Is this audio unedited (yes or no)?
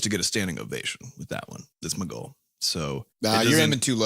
no